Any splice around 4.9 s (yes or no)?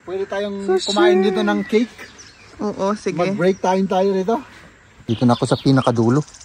yes